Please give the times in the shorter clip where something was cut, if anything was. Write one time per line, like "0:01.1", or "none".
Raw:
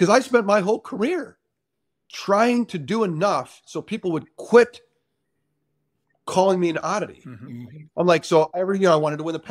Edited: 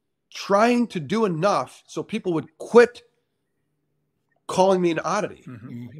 none